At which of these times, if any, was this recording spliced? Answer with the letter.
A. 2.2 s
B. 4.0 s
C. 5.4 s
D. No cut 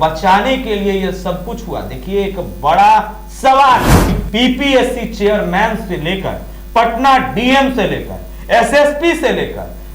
B